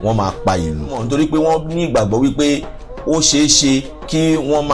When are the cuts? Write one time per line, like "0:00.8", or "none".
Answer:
0:01.0

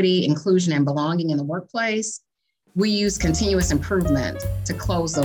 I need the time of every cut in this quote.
none

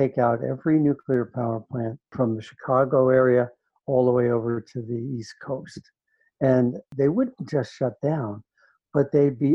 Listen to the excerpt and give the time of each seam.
0:02.0
0:06.9

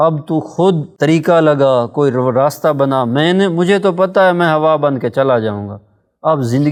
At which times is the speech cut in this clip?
none

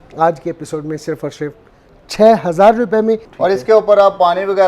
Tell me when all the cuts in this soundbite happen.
0:03.3

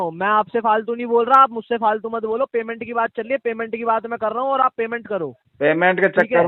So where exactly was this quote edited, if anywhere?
none

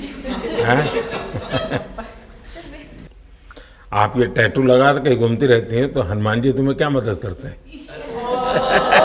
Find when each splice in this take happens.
0:03.0

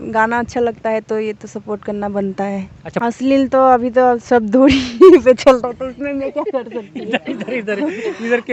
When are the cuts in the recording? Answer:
0:03.0

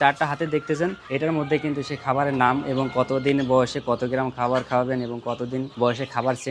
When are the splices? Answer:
0:01.0
0:05.7

